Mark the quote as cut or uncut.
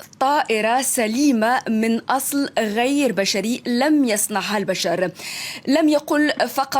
uncut